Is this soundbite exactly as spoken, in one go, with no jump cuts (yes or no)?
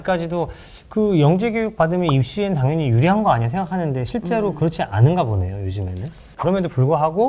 no